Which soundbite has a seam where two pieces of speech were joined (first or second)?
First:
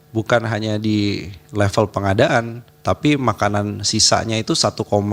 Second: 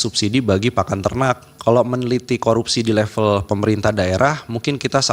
second